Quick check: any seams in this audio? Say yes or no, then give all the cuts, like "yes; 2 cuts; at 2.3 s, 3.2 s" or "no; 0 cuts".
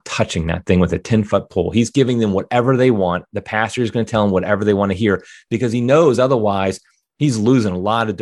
no; 0 cuts